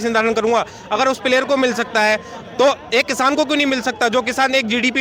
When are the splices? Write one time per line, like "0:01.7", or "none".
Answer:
none